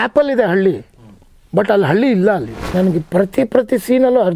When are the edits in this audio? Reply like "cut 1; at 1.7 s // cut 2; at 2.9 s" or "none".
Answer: cut 1; at 2.7 s